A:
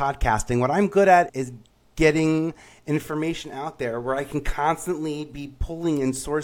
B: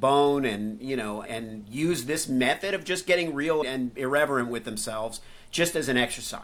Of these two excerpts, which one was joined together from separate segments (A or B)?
B